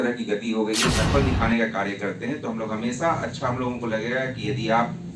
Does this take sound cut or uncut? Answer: cut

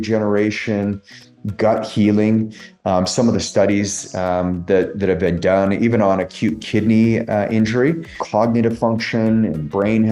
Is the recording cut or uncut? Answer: cut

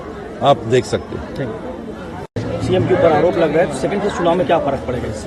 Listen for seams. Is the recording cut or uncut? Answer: cut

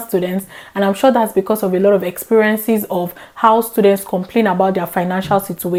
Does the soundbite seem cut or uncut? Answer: uncut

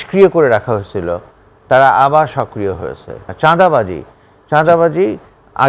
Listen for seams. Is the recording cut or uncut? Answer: cut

